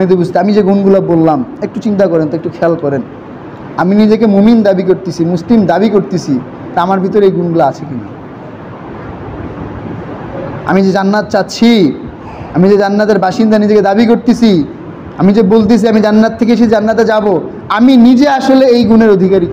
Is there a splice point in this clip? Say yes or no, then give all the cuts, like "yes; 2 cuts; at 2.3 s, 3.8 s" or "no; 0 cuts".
no; 0 cuts